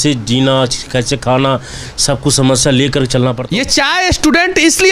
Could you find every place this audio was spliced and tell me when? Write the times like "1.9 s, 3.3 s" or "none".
3.4 s